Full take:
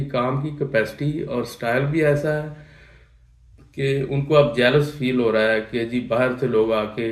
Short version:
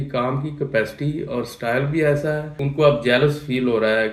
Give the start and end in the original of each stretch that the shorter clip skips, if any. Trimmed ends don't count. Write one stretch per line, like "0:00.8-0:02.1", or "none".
0:02.6-0:04.1